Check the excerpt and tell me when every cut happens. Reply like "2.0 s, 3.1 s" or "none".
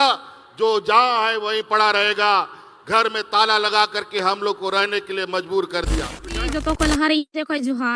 6.5 s